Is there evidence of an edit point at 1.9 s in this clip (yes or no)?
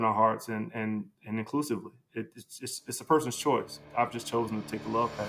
no